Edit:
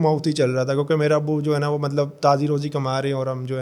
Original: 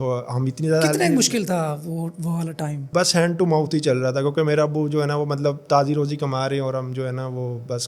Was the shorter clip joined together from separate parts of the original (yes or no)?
no